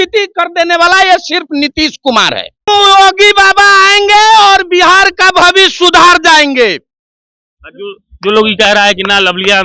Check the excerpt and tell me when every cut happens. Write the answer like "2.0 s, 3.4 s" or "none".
2.6 s